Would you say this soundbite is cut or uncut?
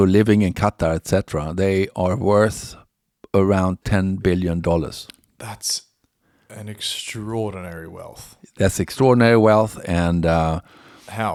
uncut